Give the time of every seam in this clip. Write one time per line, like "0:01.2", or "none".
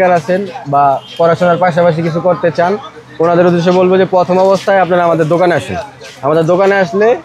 none